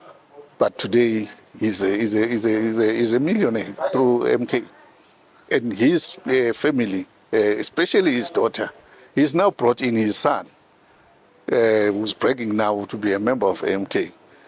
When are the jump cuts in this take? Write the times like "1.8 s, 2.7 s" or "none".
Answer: none